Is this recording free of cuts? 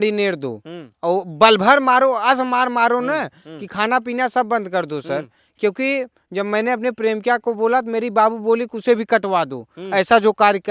yes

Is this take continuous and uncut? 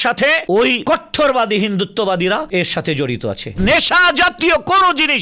no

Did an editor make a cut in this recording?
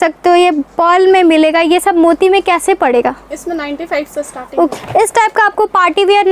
yes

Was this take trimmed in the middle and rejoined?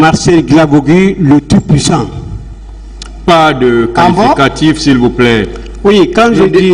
no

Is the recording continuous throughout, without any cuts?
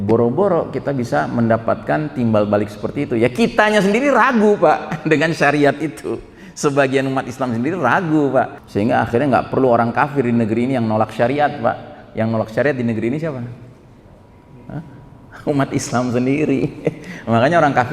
no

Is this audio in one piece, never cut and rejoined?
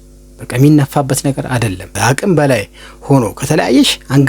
no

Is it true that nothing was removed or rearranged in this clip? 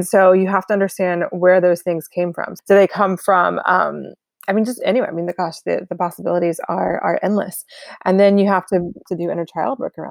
no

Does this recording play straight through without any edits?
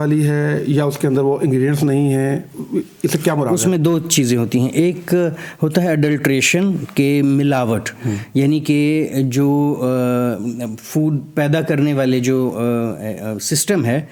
yes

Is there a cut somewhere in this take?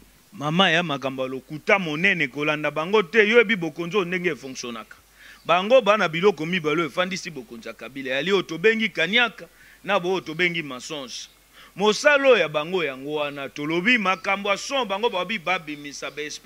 no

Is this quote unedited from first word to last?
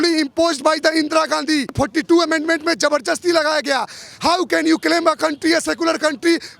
no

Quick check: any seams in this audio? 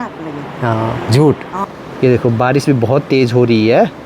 yes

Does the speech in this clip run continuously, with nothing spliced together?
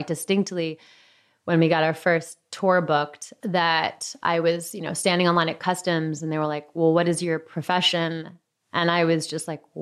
no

